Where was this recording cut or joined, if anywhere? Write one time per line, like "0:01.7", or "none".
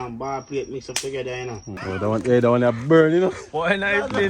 0:01.9